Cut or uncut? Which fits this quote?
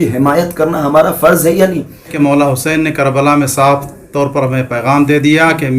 cut